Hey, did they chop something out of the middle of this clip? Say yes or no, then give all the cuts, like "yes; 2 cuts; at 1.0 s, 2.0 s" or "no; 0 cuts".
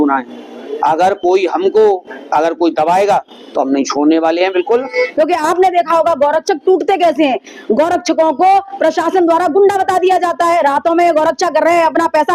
yes; 1 cut; at 5.1 s